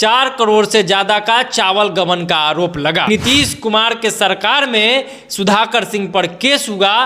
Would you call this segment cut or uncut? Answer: cut